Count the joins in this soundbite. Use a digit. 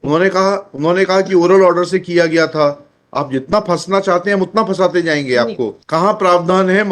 1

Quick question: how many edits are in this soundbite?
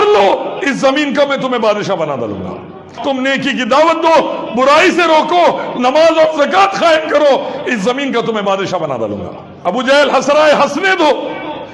2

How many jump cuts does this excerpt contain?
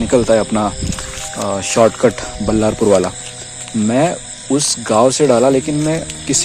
0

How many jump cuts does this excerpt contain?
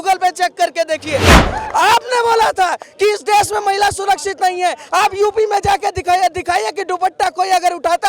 1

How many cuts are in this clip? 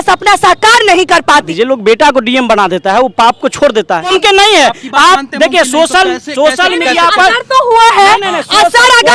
2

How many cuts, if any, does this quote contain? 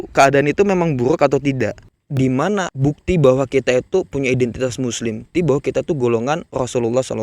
3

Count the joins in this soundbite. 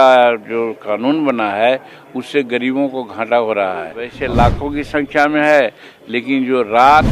1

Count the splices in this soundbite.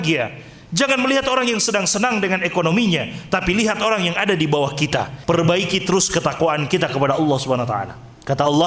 1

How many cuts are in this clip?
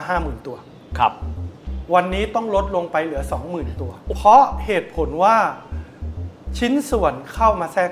1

